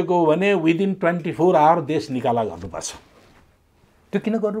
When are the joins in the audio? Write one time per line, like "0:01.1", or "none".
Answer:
none